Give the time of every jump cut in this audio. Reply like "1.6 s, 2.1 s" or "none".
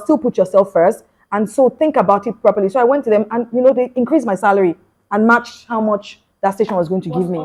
none